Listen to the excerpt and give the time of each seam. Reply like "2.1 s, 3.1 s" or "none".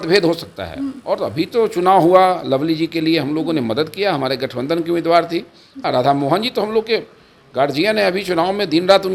5.8 s